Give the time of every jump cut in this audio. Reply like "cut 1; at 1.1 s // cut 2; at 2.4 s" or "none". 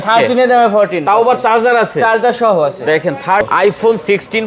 cut 1; at 3.5 s